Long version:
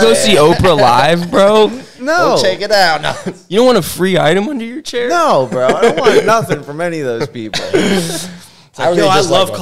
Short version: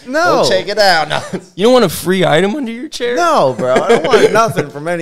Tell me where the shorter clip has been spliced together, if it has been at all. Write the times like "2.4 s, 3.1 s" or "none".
none